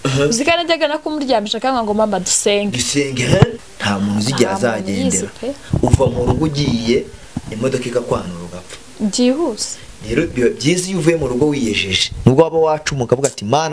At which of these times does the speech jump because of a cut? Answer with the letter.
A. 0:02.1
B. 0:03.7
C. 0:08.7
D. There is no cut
B